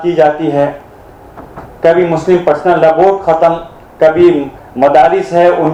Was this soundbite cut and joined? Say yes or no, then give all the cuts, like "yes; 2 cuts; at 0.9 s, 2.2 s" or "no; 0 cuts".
no; 0 cuts